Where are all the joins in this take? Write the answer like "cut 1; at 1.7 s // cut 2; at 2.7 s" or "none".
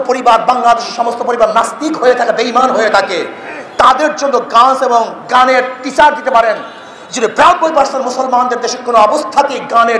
none

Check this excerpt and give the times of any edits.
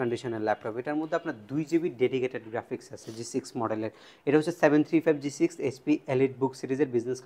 none

